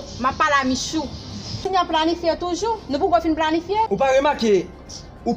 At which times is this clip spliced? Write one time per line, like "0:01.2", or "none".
0:01.6
0:03.9